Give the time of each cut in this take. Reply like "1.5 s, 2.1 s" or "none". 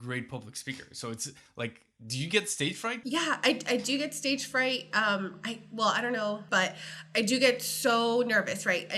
3.0 s, 6.4 s